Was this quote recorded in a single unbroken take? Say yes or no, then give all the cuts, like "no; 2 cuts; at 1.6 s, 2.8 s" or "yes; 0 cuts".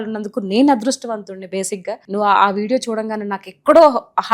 no; 1 cut; at 2.0 s